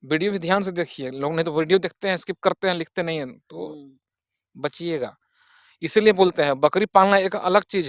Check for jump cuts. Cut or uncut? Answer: uncut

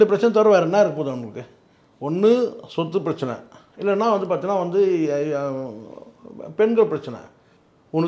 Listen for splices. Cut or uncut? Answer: uncut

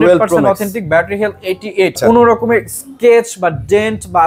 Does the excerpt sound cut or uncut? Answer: cut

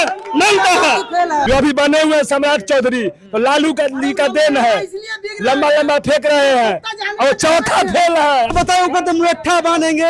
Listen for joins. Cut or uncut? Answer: cut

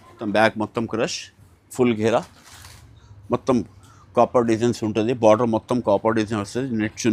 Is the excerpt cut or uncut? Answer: uncut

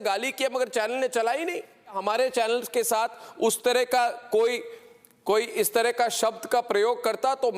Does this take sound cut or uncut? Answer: cut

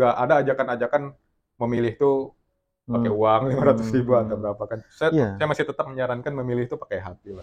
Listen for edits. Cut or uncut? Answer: uncut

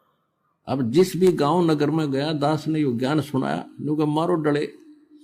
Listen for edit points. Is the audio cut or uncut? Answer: uncut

